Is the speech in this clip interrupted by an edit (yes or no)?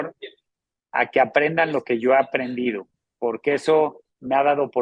no